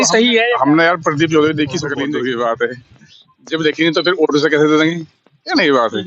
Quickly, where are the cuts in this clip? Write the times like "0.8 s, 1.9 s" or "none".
2.0 s